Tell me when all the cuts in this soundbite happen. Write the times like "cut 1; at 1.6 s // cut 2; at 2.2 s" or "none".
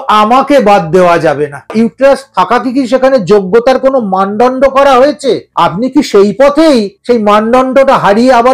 cut 1; at 1.7 s // cut 2; at 5.5 s // cut 3; at 6.9 s